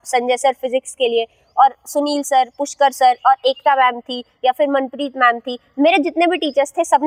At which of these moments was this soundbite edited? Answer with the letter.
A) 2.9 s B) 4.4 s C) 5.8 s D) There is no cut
D